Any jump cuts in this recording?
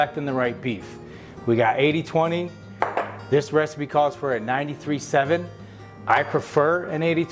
no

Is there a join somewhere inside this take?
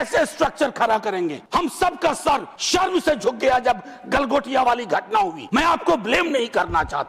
yes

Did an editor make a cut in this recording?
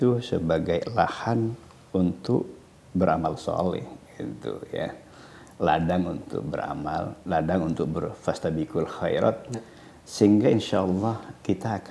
no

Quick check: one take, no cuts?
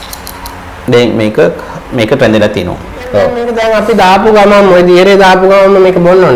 no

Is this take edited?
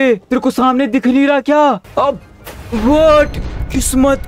yes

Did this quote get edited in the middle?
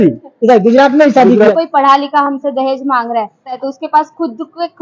yes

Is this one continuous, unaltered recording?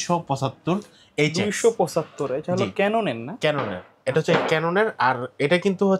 yes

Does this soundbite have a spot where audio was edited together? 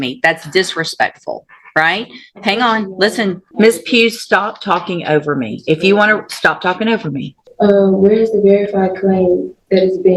yes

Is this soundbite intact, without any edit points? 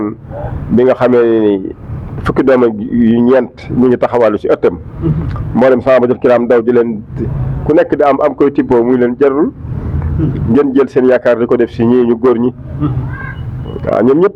yes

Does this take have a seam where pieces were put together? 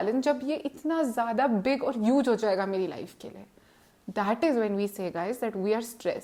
no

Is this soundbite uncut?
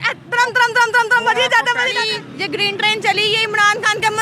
no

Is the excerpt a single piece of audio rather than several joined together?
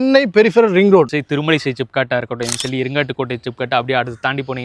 no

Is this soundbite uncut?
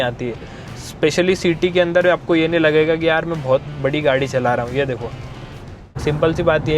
no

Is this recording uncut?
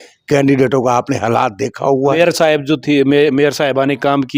no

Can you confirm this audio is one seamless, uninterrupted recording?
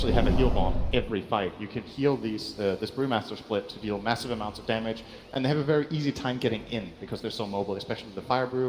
no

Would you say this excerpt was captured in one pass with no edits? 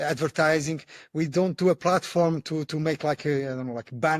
yes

